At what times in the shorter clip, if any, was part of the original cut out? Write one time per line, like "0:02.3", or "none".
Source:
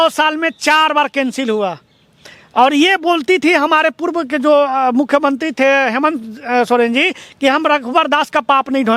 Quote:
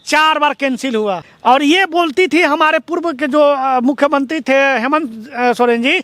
0:01.3